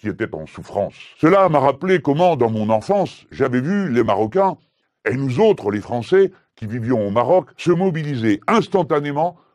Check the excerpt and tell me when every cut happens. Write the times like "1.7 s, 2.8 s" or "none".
none